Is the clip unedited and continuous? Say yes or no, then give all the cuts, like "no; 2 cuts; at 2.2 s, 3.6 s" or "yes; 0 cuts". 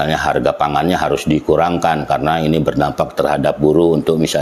yes; 0 cuts